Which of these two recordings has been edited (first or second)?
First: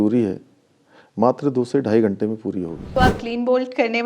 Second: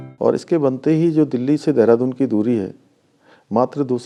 first